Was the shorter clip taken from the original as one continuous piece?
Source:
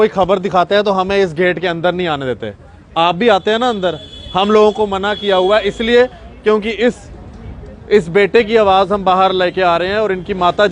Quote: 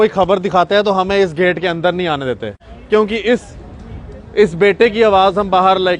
no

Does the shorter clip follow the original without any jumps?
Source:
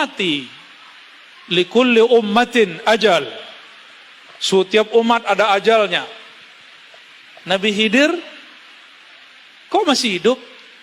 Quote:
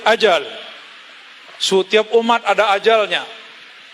yes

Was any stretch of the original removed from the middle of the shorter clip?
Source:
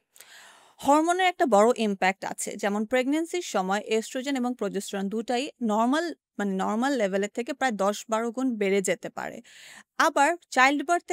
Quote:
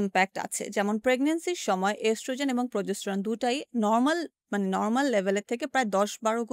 no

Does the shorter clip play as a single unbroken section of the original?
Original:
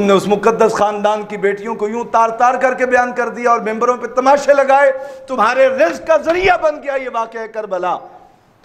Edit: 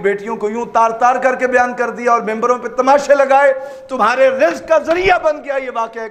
yes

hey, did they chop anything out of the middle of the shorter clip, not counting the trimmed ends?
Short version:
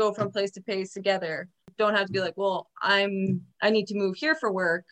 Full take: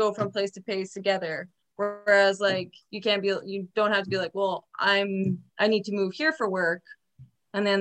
yes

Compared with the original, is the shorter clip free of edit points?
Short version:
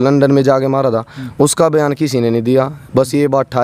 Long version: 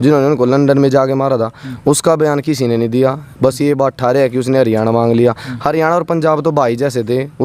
yes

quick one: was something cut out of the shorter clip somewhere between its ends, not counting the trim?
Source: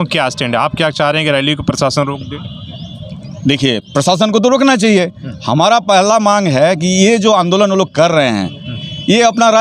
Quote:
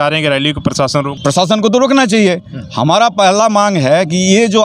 yes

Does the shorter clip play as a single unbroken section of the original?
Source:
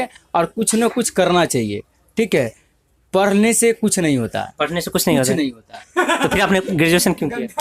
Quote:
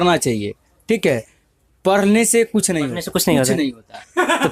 no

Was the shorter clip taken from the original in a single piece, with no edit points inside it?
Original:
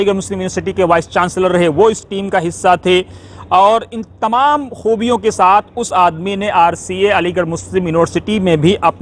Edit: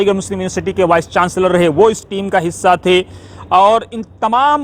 yes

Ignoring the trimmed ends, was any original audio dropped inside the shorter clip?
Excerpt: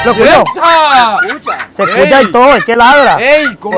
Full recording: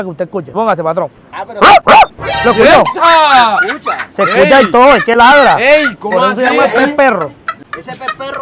no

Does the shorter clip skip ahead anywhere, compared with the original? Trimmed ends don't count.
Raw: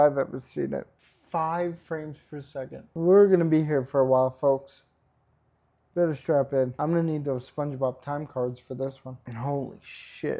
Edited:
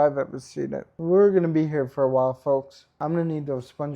yes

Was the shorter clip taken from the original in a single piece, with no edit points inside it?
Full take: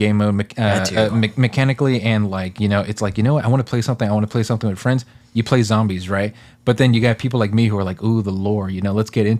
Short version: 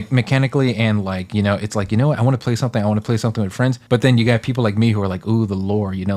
no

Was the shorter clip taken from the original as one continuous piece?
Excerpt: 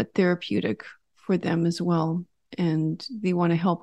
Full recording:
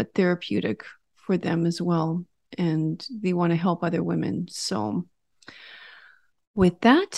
yes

